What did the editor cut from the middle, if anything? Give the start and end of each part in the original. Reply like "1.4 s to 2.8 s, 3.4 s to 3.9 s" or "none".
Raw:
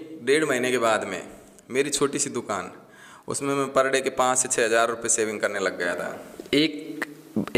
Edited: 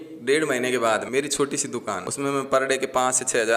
1.1 s to 1.7 s, 2.7 s to 3.3 s

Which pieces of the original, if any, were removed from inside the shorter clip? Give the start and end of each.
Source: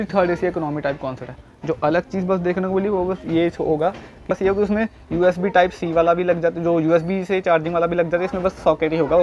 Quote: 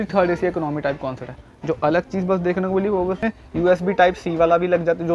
3.2 s to 4.8 s

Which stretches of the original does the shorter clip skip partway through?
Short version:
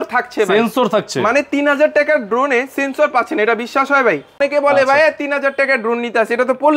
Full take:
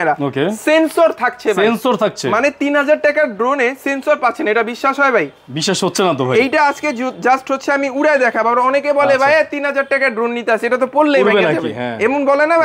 5.5 s to 8.7 s

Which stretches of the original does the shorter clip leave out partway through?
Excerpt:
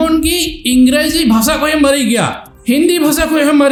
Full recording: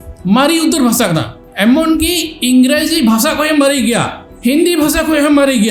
none

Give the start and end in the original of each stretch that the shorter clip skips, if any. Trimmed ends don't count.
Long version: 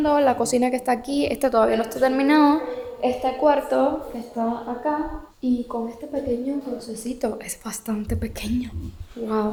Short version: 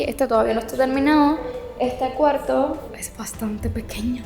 4.2 s to 7.4 s

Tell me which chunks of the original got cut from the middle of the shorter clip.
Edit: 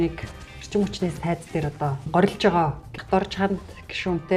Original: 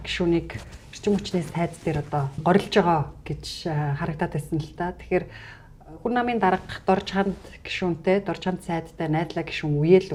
3.3 s to 6.7 s

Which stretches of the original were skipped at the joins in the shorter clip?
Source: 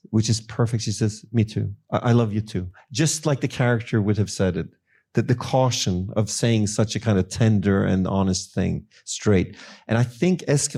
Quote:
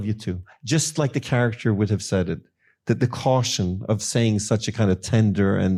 none

